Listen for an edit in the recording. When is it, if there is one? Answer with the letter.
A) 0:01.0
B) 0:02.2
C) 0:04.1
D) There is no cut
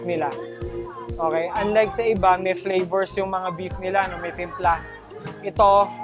D